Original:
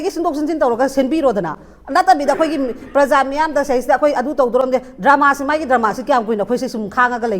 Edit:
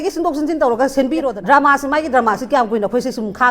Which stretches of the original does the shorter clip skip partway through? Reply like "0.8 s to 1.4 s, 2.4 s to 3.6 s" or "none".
1.3 s to 4.9 s